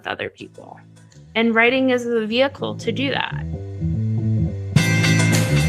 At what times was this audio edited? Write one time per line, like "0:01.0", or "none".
0:03.8